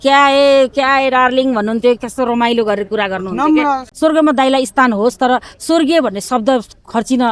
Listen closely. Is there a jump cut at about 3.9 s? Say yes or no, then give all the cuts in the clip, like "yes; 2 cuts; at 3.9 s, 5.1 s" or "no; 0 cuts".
yes; 1 cut; at 3.9 s